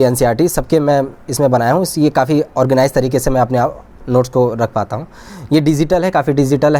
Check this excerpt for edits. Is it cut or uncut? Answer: uncut